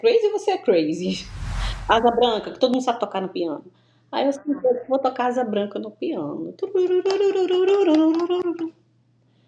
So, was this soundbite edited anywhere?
yes; 1 cut; at 1.6 s

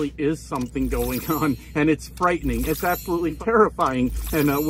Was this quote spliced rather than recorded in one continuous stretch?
yes; 1 cut; at 3.4 s

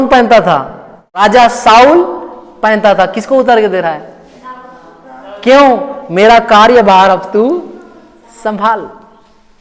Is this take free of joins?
no; 1 cut; at 1.2 s

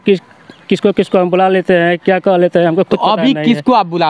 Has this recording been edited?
no; 0 cuts

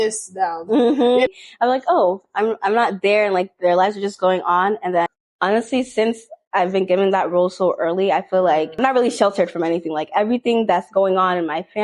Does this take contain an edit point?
yes; 3 cuts; at 1.3 s, 5.2 s, 8.8 s

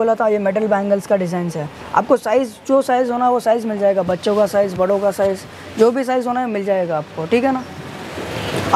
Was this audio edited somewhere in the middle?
no; 0 cuts

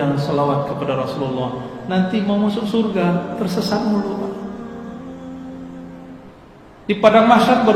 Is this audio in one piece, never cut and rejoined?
yes; 0 cuts

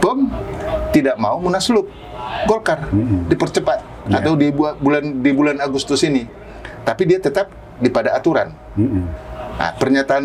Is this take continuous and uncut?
yes; 0 cuts

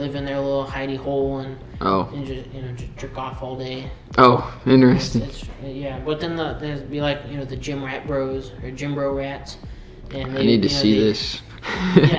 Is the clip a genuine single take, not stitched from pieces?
yes; 0 cuts

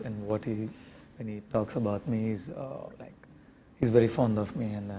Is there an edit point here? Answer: no; 0 cuts

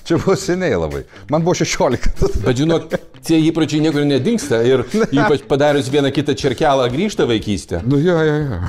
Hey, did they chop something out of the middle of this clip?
no; 0 cuts

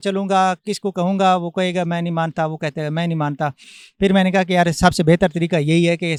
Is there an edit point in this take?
no; 0 cuts

